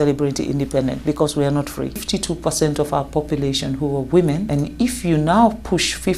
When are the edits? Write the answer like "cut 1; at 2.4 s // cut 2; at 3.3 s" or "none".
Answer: cut 1; at 2.0 s // cut 2; at 4.5 s